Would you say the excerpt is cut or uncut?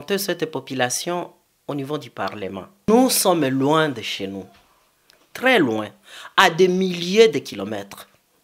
cut